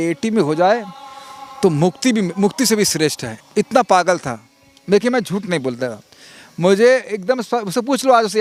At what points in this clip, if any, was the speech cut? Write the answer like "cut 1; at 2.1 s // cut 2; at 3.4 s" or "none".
none